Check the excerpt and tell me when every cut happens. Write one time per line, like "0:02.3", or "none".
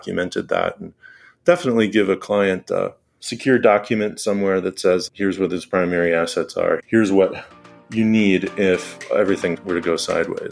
none